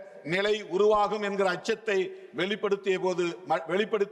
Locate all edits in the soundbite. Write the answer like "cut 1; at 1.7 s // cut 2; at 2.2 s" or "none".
none